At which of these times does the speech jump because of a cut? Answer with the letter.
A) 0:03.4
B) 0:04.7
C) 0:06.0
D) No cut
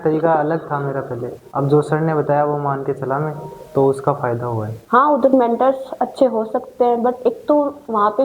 B